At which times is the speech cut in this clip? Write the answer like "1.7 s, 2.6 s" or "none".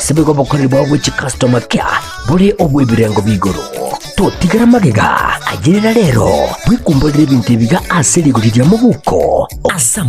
1.7 s

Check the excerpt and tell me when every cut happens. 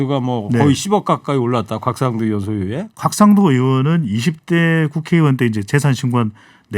2.9 s

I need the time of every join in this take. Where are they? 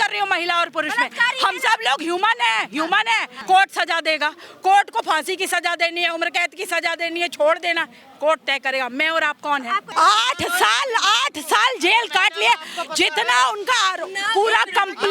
3.3 s, 9.9 s

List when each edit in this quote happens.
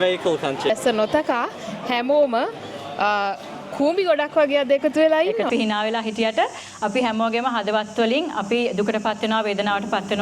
0.7 s, 5.5 s

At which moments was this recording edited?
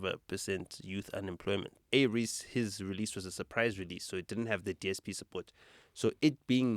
1.8 s

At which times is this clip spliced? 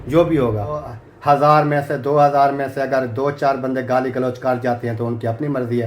0.9 s

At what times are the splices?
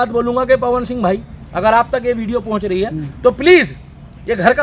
none

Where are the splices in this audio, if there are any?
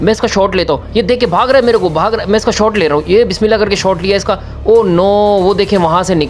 none

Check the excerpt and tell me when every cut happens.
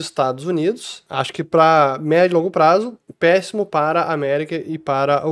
0.9 s

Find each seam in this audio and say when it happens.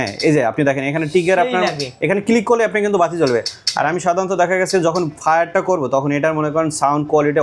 none

